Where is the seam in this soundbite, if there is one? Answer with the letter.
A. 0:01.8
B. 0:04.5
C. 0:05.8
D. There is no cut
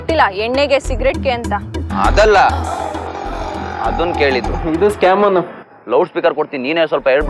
B